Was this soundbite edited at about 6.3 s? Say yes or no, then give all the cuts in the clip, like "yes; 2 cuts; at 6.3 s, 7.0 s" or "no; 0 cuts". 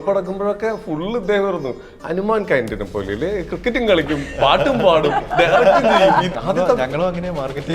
yes; 1 cut; at 6.3 s